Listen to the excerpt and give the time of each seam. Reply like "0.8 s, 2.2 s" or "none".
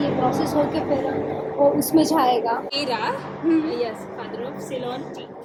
none